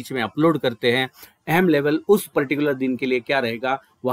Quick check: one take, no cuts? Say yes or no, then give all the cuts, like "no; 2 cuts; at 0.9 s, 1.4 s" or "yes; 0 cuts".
yes; 0 cuts